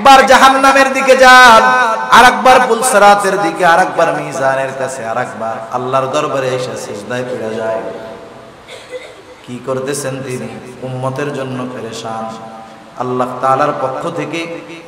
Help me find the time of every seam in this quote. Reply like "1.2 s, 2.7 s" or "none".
none